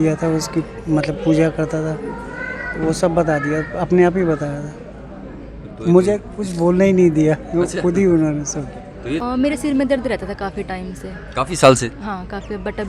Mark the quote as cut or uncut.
cut